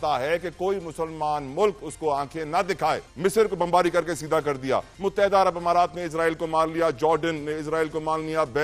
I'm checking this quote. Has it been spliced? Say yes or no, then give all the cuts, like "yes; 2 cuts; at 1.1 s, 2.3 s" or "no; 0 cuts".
yes; 2 cuts; at 3.1 s, 4.9 s